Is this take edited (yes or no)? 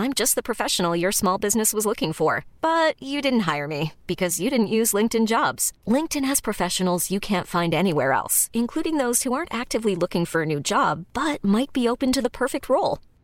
no